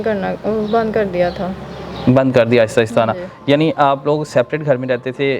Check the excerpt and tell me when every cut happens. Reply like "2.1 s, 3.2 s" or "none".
none